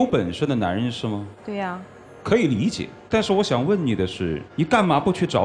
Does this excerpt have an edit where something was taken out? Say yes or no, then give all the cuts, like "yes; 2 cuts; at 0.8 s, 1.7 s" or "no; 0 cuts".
yes; 3 cuts; at 1.3 s, 2.9 s, 4.4 s